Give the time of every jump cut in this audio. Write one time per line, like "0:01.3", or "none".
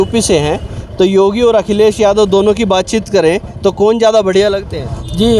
none